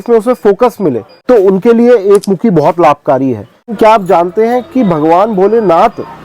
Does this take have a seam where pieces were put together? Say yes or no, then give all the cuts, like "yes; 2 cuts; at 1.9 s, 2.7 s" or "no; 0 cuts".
yes; 2 cuts; at 1.1 s, 3.7 s